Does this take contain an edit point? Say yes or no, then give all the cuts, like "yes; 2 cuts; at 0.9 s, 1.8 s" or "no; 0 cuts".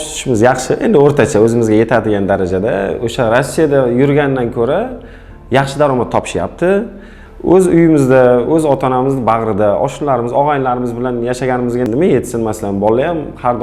no; 0 cuts